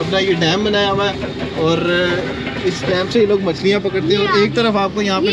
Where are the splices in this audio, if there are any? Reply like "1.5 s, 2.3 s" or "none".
none